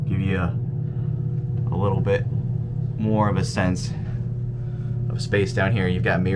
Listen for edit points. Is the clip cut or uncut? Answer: uncut